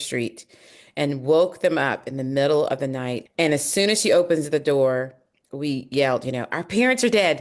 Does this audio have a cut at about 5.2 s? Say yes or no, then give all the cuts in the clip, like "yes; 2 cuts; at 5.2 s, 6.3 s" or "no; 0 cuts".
no; 1 cut; at 3.2 s